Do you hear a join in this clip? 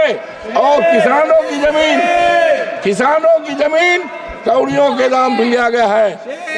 no; 0 cuts

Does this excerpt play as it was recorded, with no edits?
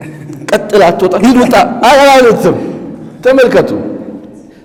yes; 0 cuts

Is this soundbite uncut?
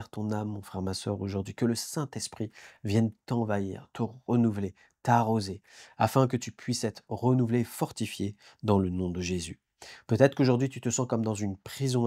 no; 1 cut; at 9.6 s

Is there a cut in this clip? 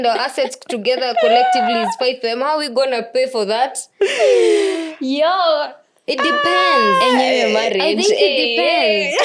no; 0 cuts

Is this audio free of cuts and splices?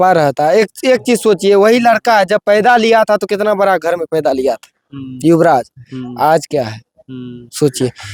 yes; 0 cuts

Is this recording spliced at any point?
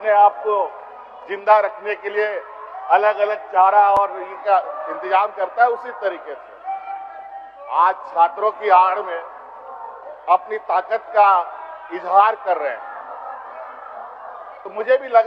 no; 0 cuts

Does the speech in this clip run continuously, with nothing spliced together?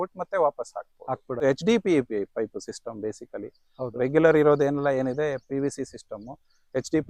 no; 1 cut; at 1.4 s

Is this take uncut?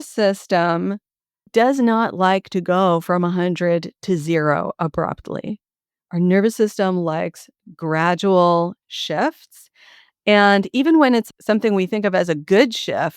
no; 2 cuts; at 1.5 s, 11.2 s

